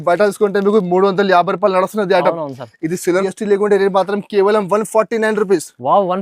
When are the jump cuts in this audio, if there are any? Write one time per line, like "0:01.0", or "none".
0:03.2